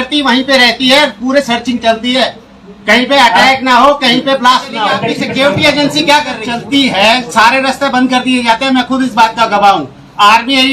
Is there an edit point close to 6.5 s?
yes; 2 cuts; at 5.1 s, 6.5 s

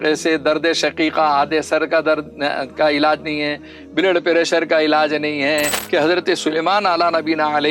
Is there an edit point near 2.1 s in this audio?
no; 1 cut; at 5.8 s

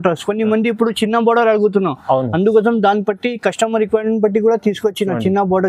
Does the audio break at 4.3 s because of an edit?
no; 0 cuts

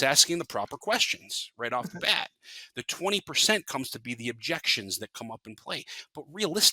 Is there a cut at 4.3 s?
no; 0 cuts

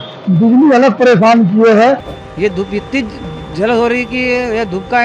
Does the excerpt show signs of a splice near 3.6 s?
no; 1 cut; at 2.2 s

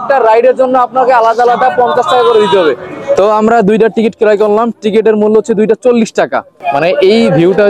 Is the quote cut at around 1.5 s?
no; 2 cuts; at 3.2 s, 6.5 s

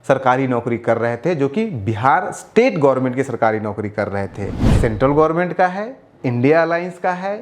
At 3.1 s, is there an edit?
no; 1 cut; at 4.6 s

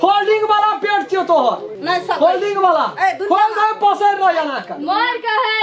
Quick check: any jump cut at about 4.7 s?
no; 1 cut; at 1.7 s

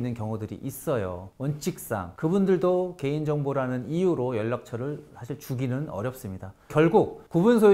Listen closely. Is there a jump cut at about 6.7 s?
yes; 2 cuts; at 1.3 s, 6.7 s

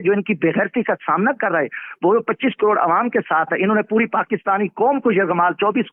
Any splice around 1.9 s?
no; 0 cuts

